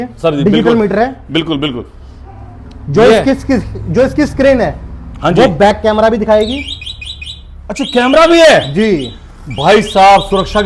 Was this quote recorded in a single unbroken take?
yes; 0 cuts

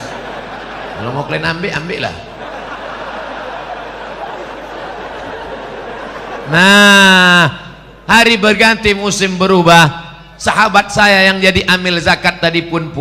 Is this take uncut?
no; 1 cut; at 4.3 s

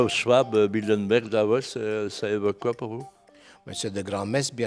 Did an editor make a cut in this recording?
no; 0 cuts

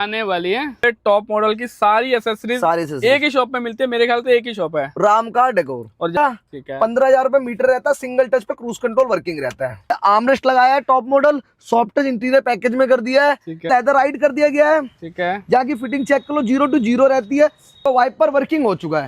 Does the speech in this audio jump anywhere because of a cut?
yes; 5 cuts; at 0.8 s, 6.2 s, 10.0 s, 13.7 s, 17.8 s

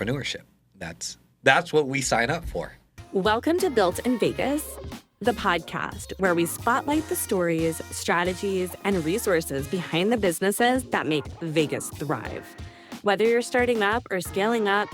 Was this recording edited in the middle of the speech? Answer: yes; 1 cut; at 3.1 s

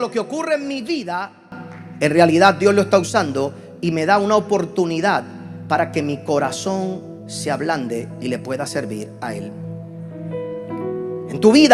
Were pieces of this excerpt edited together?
no; 0 cuts

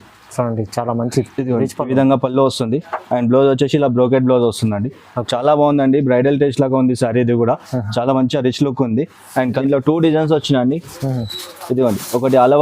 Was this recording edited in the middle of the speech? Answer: yes; 1 cut; at 9.6 s

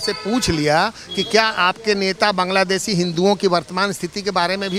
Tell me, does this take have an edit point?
no; 0 cuts

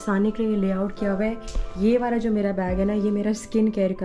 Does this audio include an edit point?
no; 0 cuts

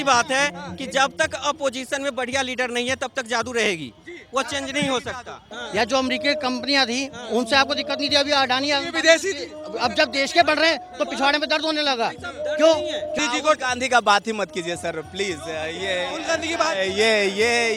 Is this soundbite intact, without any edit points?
no; 2 cuts; at 5.5 s, 13.2 s

